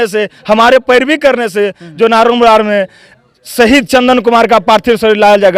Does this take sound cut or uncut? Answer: uncut